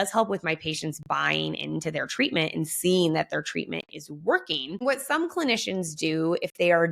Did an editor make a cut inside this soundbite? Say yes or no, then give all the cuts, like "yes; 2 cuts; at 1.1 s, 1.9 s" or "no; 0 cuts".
yes; 1 cut; at 4.8 s